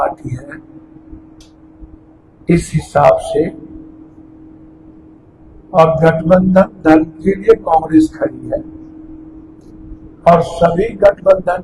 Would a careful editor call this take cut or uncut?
uncut